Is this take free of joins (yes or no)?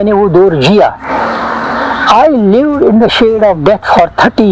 yes